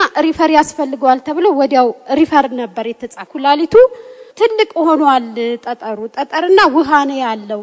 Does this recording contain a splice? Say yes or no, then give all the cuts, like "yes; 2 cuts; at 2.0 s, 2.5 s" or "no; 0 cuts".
yes; 2 cuts; at 3.2 s, 4.2 s